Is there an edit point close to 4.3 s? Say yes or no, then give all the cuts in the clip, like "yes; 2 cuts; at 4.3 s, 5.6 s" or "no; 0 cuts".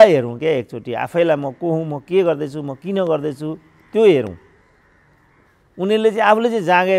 no; 0 cuts